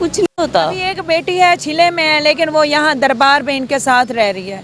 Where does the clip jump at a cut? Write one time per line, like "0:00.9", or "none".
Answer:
0:00.9